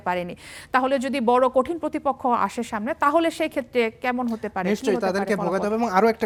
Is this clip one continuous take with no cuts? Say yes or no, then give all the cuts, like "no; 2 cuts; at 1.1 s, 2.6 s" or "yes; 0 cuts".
yes; 0 cuts